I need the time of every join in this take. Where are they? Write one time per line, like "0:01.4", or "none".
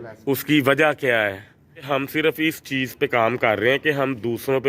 0:01.9